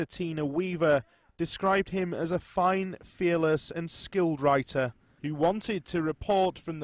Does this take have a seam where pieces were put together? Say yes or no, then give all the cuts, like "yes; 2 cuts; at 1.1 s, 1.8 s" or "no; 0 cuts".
yes; 1 cut; at 5.3 s